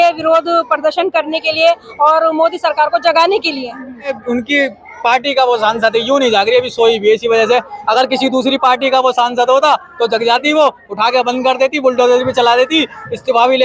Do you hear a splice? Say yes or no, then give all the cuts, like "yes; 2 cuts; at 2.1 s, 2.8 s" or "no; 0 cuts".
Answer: yes; 1 cut; at 4.2 s